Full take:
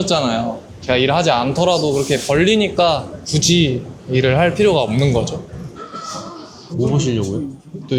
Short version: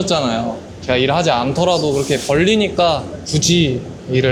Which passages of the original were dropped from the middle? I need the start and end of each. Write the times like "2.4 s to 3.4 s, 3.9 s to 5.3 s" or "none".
none